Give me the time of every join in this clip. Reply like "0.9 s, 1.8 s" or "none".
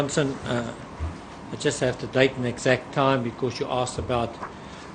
none